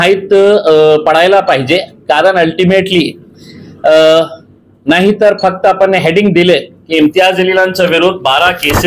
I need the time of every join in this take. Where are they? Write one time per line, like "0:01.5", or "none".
none